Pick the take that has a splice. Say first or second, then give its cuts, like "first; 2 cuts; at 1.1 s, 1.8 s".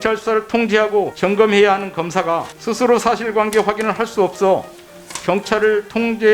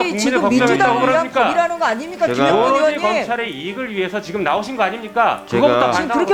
first; 2 cuts; at 1.1 s, 2.6 s